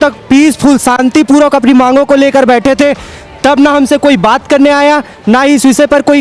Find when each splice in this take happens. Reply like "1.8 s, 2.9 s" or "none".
none